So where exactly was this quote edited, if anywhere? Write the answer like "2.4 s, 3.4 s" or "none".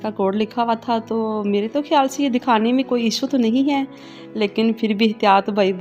none